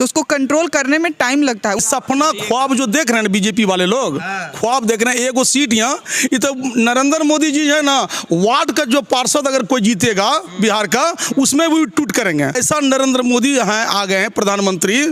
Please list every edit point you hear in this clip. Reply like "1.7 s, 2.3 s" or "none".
1.8 s, 12.6 s